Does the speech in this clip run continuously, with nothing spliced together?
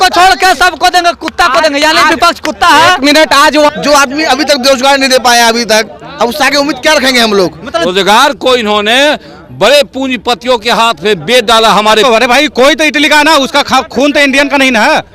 no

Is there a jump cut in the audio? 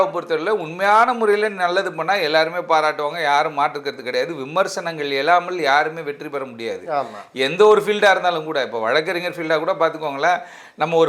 no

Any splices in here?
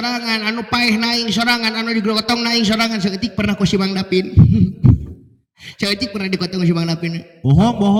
no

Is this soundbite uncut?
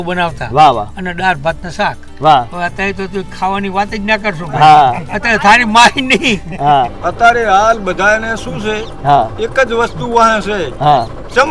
no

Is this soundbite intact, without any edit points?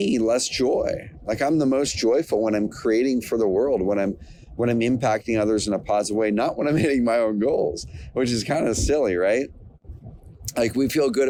yes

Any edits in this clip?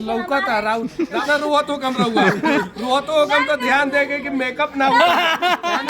yes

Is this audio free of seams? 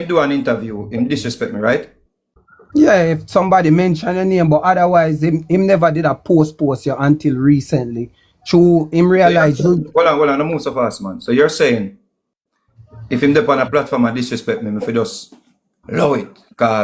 yes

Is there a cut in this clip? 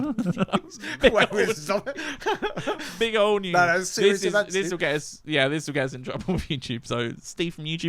no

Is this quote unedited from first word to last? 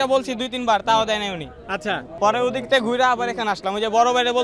no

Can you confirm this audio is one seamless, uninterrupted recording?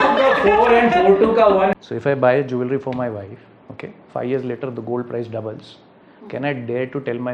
no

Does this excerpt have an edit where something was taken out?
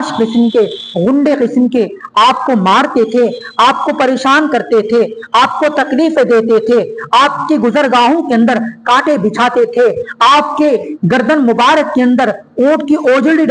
no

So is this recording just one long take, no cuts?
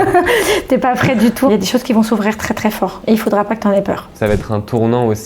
no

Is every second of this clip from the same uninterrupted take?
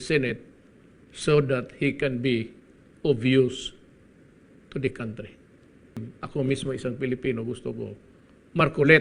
no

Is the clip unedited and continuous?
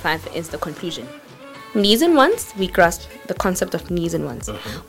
yes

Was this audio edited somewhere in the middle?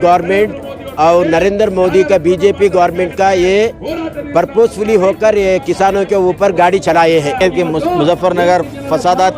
yes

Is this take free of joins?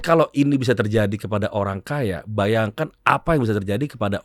yes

